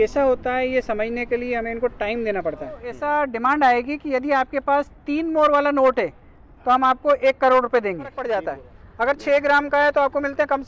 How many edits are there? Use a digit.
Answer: 2